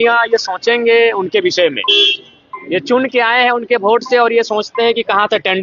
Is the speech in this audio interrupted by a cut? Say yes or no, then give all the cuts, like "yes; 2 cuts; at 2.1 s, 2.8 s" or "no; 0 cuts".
no; 0 cuts